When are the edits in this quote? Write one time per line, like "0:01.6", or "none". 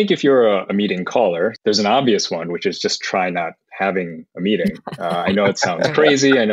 0:01.6

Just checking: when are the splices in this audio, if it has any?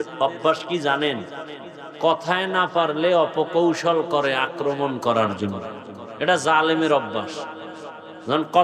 none

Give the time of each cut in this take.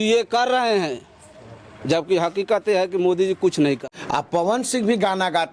0:03.9

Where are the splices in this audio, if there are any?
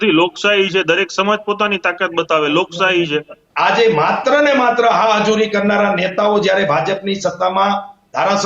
0:03.4

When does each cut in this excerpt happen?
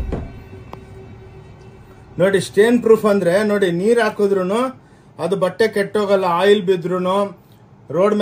none

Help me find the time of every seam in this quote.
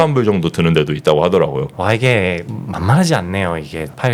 0:01.7

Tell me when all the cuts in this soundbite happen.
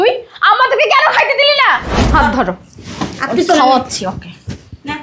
0:01.9

